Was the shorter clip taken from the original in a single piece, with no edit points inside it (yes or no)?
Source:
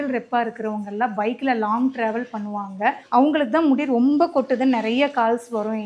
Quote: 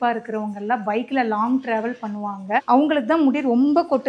no